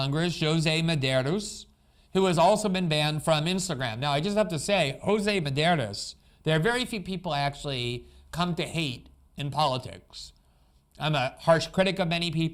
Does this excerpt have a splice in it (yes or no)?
no